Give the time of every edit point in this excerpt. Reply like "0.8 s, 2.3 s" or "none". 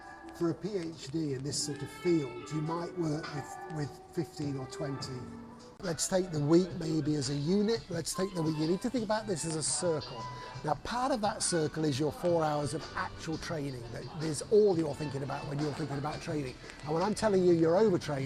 5.9 s